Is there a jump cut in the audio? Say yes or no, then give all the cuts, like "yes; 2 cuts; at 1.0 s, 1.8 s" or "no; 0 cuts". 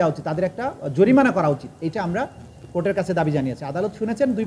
no; 0 cuts